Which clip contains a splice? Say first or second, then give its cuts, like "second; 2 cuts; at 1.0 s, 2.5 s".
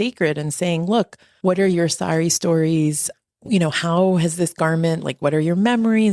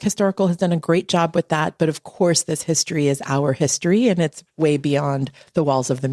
first; 1 cut; at 1.2 s